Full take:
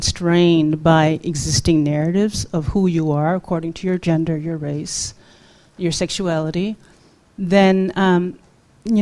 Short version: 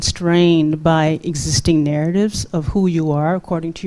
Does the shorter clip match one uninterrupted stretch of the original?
yes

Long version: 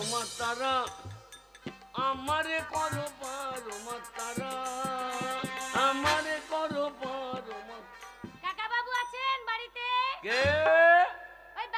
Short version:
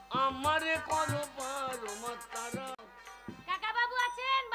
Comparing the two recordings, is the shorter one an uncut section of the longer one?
no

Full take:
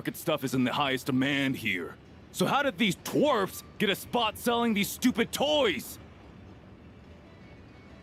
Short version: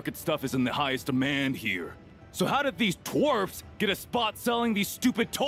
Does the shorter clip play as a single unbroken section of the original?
yes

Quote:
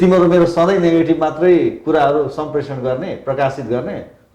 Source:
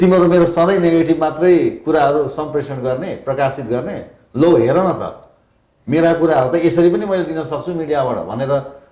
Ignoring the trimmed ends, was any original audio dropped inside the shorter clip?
no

